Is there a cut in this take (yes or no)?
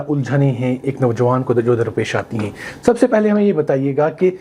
no